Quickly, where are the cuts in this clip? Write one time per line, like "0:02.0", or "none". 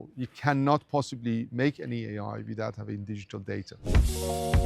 0:03.7